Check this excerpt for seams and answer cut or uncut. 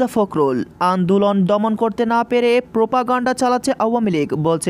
uncut